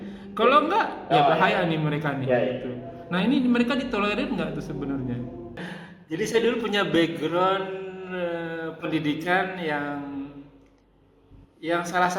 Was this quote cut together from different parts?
yes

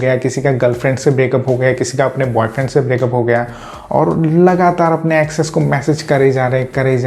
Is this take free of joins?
yes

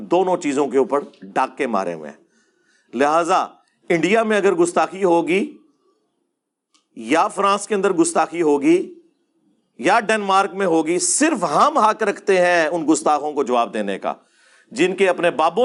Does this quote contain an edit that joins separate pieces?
no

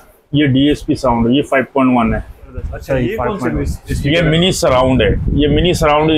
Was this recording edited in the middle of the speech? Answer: yes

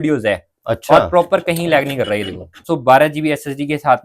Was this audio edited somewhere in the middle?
yes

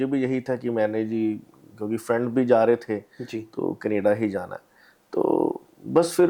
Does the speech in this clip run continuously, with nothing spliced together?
yes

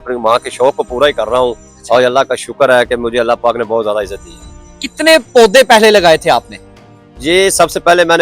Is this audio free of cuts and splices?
yes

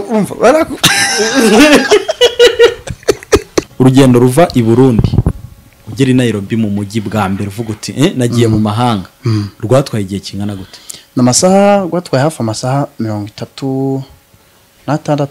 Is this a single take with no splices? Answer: no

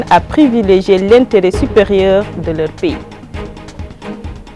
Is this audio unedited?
no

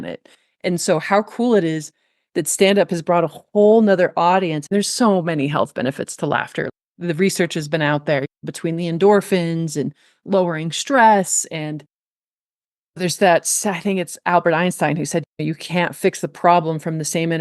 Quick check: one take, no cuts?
no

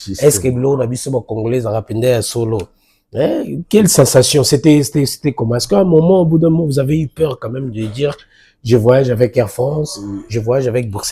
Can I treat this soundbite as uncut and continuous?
yes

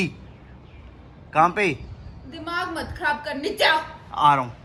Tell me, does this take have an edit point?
no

